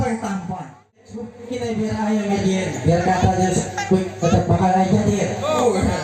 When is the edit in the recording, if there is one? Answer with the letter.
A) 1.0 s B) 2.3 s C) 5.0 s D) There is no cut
A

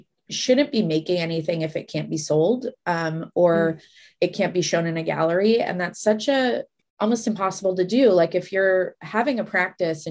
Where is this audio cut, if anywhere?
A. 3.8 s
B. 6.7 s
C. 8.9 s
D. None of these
B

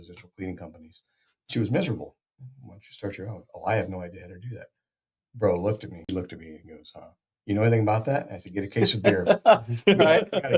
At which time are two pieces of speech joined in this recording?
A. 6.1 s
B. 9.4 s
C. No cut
A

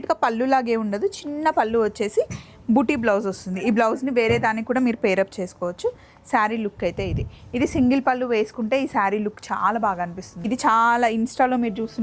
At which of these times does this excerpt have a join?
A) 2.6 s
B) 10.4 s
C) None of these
B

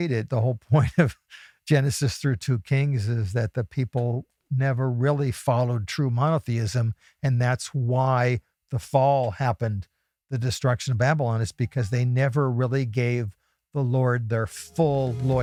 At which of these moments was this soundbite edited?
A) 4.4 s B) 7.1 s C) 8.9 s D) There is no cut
D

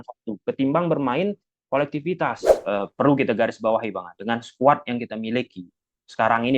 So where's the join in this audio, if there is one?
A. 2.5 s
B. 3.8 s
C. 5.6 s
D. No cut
A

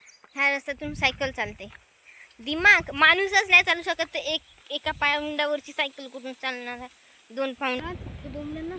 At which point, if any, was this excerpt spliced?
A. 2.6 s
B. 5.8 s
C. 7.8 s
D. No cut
C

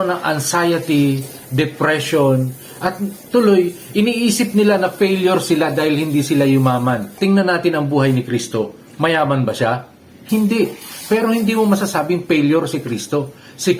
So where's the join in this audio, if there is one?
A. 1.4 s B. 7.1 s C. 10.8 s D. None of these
B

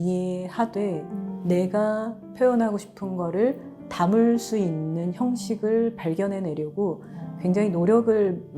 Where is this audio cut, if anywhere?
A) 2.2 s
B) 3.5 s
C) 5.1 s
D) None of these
D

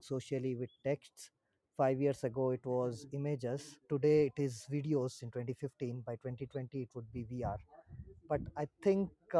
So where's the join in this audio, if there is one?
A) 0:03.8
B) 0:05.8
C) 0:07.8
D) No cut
A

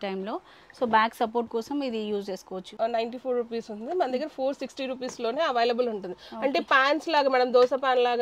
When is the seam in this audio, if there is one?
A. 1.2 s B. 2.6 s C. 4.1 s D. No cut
B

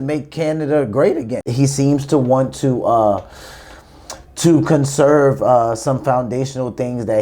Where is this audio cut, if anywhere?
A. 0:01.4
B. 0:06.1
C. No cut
A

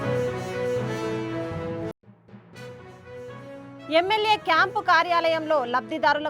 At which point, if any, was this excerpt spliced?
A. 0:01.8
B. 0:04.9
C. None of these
A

